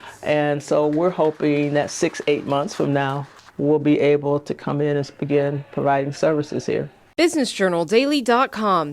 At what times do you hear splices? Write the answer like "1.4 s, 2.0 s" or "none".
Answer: 7.0 s